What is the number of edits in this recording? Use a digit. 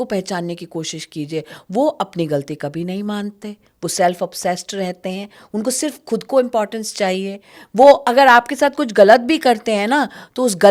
0